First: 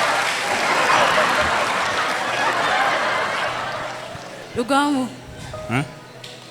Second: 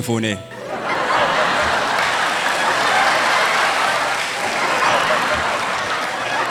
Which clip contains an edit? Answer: first; 1 cut; at 4.4 s

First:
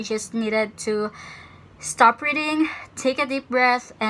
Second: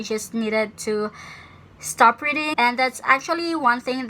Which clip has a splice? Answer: second; 1 cut; at 2.5 s

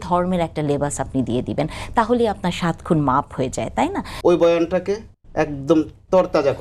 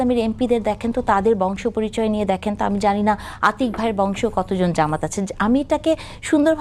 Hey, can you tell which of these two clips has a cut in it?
first; 2 cuts; at 4.1 s, 5.2 s

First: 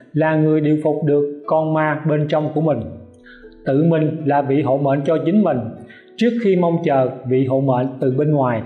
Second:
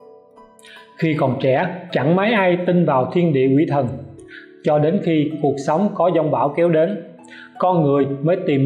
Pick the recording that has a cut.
second; 1 cut; at 1.0 s

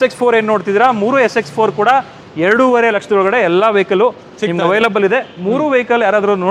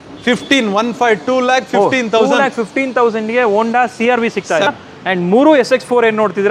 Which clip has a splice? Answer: second; 1 cut; at 4.7 s

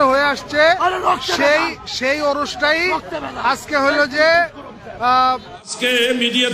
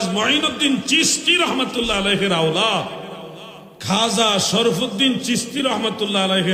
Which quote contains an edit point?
first; 1 cut; at 5.5 s

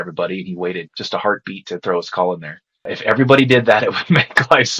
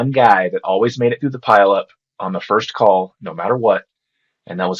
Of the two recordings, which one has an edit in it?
first; 2 cuts; at 0.9 s, 2.9 s

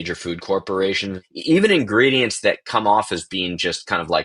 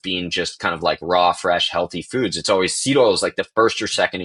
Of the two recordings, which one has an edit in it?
first; 1 cut; at 1.2 s

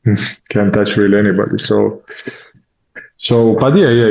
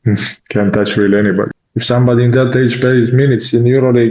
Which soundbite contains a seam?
second; 1 cut; at 1.5 s

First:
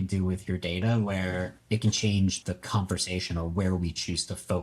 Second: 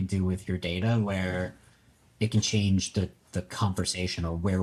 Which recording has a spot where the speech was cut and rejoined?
first; 2 cuts; at 1.6 s, 2.4 s

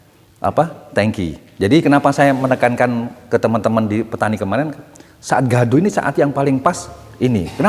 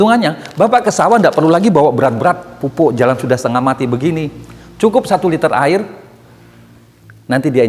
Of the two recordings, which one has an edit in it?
first; 1 cut; at 1.8 s

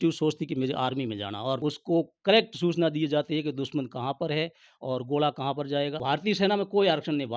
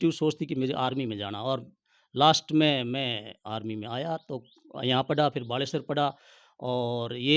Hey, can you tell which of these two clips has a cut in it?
first; 2 cuts; at 1.6 s, 6.0 s

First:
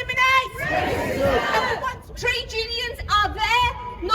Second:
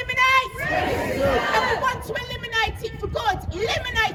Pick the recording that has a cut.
first; 1 cut; at 2.0 s

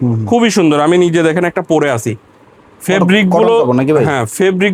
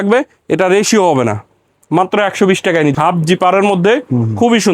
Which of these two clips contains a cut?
second; 1 cut; at 2.9 s

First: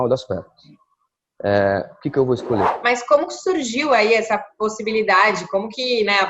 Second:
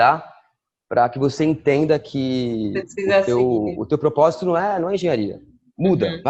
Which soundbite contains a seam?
first; 1 cut; at 2.8 s

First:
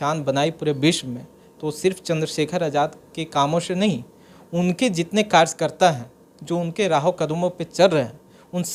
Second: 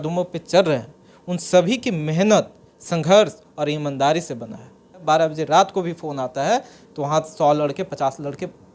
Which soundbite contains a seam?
second; 1 cut; at 5.0 s

